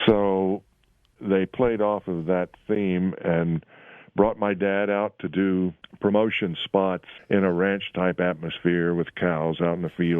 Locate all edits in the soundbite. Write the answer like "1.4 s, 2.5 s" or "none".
1.1 s, 5.8 s, 7.1 s